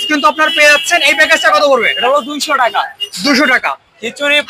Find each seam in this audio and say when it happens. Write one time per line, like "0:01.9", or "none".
none